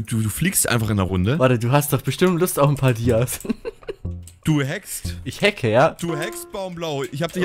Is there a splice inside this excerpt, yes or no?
no